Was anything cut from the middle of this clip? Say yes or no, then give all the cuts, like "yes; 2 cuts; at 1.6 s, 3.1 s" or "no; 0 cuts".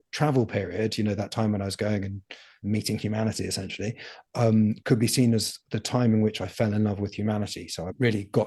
no; 0 cuts